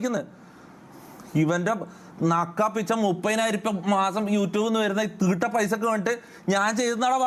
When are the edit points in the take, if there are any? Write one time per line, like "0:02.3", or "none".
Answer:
none